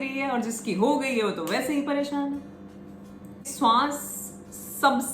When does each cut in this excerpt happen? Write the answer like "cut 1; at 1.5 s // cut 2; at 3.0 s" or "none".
cut 1; at 3.5 s